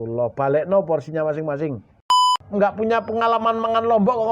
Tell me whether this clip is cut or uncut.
cut